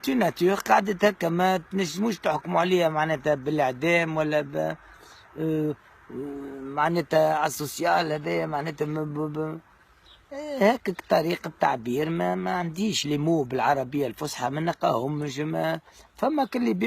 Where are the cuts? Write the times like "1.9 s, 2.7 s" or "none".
10.7 s